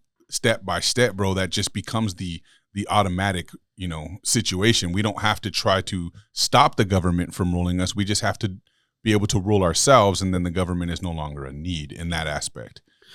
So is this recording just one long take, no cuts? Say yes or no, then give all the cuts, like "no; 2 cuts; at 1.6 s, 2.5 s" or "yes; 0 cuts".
yes; 0 cuts